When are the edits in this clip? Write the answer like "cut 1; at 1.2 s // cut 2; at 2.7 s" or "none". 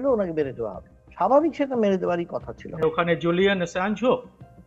cut 1; at 2.8 s